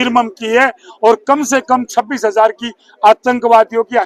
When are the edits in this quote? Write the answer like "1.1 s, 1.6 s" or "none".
none